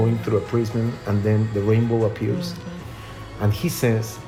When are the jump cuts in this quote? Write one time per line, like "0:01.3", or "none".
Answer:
none